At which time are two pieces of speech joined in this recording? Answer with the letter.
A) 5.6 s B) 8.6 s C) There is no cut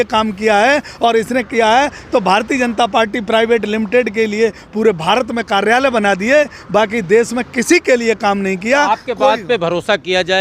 C